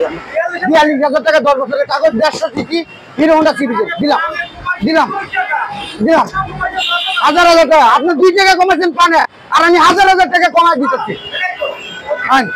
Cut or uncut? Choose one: uncut